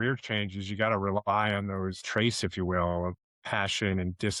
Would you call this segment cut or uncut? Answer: cut